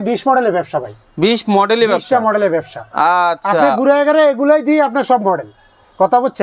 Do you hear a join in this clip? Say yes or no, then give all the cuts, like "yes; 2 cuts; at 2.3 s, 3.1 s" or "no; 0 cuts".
no; 0 cuts